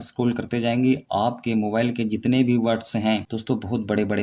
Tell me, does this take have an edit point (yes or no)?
yes